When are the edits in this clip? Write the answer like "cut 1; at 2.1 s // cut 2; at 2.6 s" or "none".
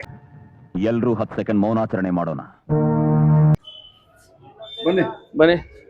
cut 1; at 3.7 s